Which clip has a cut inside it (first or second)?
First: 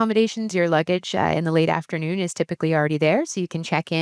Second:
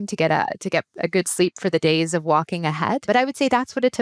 second